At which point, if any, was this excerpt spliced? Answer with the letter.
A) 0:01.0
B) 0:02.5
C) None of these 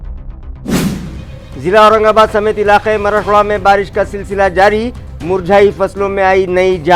C